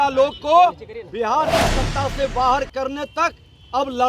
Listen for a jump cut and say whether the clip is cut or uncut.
uncut